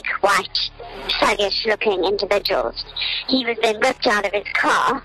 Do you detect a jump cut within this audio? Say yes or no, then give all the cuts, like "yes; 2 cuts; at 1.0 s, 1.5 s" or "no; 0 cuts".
no; 0 cuts